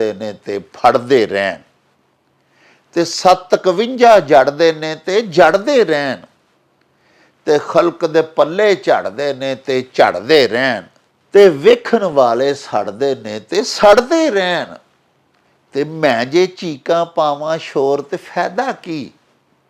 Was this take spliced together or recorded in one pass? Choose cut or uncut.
uncut